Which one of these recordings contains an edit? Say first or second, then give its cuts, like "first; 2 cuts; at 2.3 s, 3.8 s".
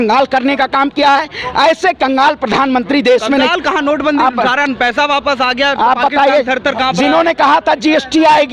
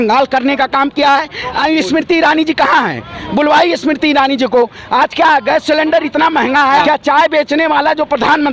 second; 2 cuts; at 1.6 s, 6.8 s